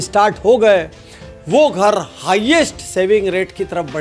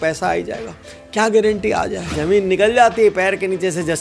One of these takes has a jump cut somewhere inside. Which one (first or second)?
second